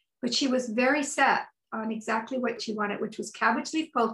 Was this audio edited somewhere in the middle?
yes; 1 cut; at 2.6 s

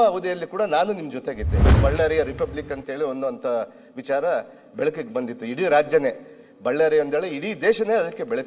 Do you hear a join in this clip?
yes; 1 cut; at 1.8 s

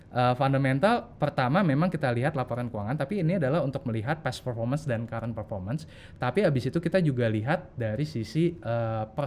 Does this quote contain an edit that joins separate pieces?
no; 0 cuts

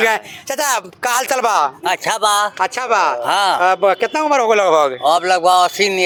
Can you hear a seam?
no; 0 cuts

